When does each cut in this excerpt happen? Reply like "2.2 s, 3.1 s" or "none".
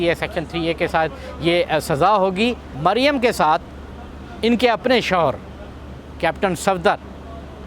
2.7 s